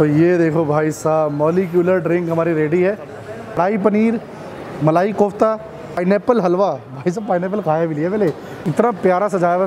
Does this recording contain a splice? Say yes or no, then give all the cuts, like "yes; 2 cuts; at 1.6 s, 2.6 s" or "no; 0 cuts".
yes; 3 cuts; at 3.6 s, 6.0 s, 8.5 s